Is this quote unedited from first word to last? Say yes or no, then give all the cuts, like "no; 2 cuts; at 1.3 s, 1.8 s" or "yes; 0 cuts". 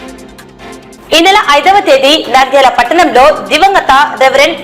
no; 1 cut; at 0.9 s